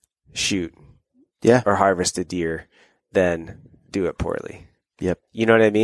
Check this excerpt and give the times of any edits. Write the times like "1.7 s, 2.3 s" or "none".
none

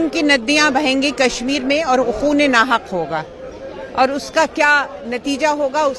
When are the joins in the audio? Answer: none

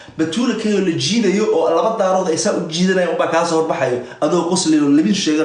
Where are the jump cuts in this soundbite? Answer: none

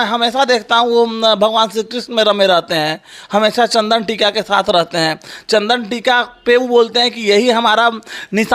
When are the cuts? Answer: none

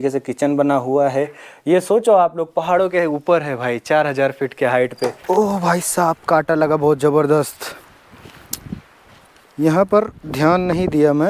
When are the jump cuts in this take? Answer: 5.2 s

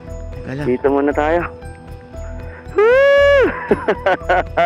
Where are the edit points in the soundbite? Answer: 2.1 s

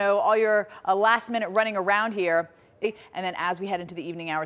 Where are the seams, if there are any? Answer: 2.7 s

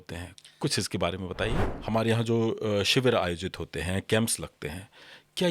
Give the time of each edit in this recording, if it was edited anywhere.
1.8 s

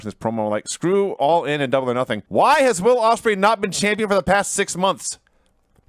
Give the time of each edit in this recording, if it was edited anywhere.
2.2 s

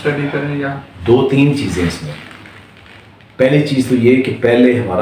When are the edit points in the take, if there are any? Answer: none

